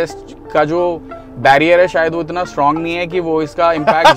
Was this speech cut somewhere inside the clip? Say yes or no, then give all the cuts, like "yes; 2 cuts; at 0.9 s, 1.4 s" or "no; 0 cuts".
no; 0 cuts